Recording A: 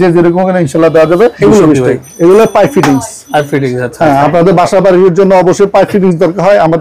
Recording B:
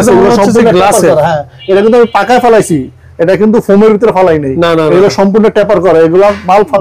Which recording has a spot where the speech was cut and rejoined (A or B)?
A